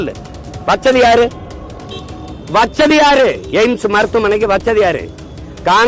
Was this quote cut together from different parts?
no; 0 cuts

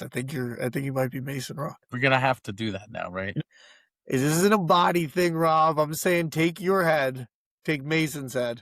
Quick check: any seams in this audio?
yes; 1 cut; at 3.4 s

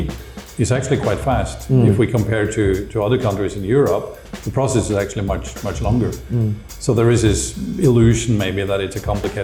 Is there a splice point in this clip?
no; 0 cuts

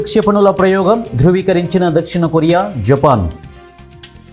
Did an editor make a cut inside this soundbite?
no; 0 cuts

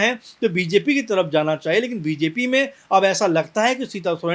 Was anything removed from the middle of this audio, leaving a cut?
no; 0 cuts

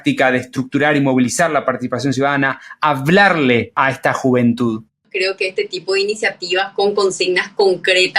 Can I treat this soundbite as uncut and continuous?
no; 2 cuts; at 3.7 s, 5.1 s

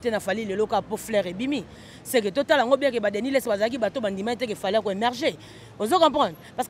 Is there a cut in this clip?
no; 0 cuts

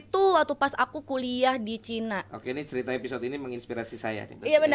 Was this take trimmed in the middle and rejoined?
no; 0 cuts

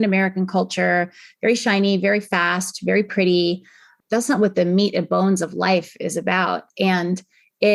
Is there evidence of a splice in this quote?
no; 0 cuts

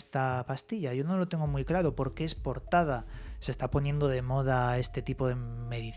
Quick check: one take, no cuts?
yes; 0 cuts

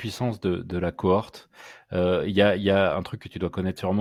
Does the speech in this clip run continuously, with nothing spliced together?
yes; 0 cuts

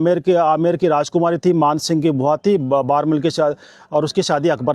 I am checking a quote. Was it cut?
no; 0 cuts

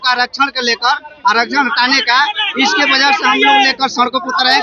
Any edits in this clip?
no; 0 cuts

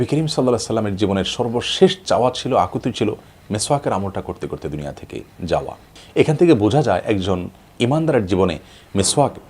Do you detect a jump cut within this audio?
yes; 1 cut; at 5.9 s

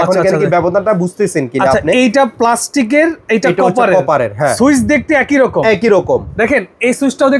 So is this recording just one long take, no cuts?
no; 1 cut; at 4.5 s

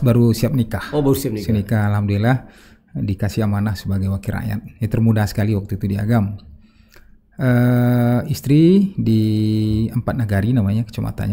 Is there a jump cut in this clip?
no; 0 cuts

